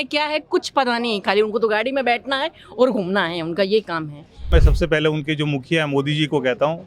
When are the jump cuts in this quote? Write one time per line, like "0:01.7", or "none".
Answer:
0:04.5

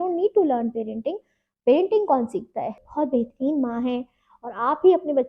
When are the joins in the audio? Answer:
0:02.8

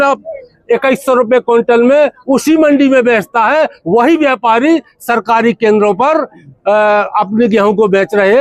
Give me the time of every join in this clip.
none

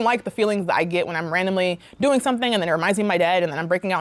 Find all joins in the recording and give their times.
none

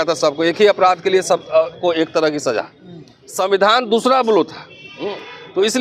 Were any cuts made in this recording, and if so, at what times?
none

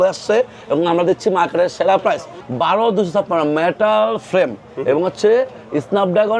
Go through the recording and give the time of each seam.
0:02.4

